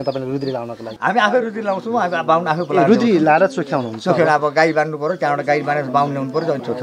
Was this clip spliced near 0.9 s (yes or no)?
yes